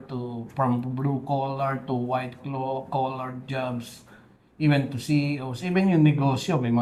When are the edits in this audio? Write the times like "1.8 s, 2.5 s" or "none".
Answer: none